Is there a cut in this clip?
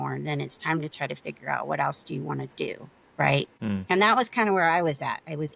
yes; 1 cut; at 3.5 s

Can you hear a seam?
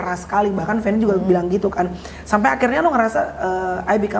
no; 0 cuts

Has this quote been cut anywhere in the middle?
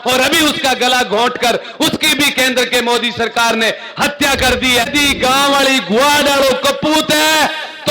yes; 1 cut; at 4.9 s

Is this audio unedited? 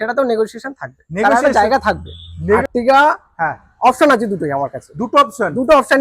no; 1 cut; at 2.6 s

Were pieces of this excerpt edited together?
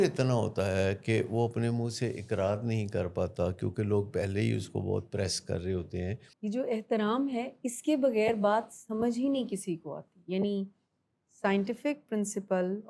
yes; 1 cut; at 6.2 s

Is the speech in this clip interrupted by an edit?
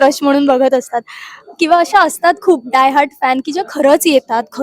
no; 0 cuts

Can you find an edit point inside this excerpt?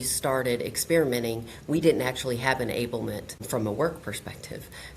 yes; 1 cut; at 3.3 s

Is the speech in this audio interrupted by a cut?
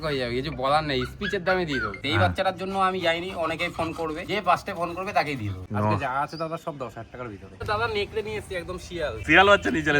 yes; 5 cuts; at 2.0 s, 4.2 s, 5.6 s, 7.7 s, 9.2 s

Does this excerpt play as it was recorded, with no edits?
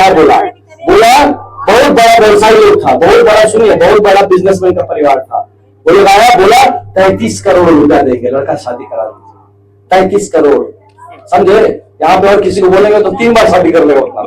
yes; 0 cuts

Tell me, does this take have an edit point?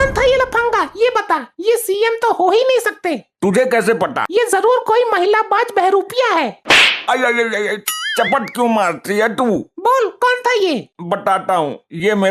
yes; 1 cut; at 4.2 s

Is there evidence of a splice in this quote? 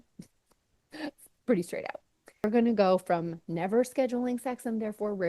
yes; 1 cut; at 2.4 s

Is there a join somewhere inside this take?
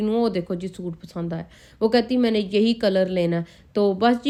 no; 0 cuts

